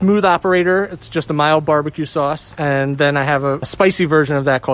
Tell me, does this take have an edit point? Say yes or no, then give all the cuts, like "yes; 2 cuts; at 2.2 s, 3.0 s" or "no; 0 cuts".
yes; 1 cut; at 3.7 s